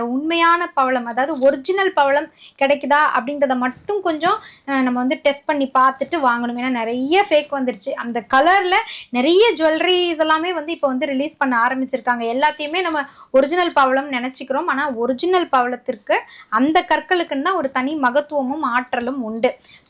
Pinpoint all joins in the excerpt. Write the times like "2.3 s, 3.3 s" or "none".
none